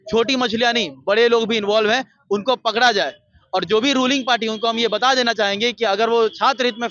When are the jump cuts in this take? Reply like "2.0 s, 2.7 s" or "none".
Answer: none